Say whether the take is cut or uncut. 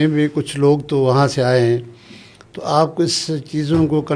uncut